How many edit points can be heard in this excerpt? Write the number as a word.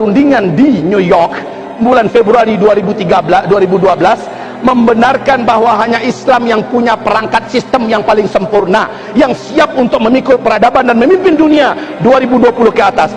zero